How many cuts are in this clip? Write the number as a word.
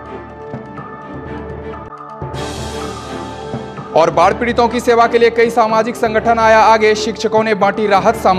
one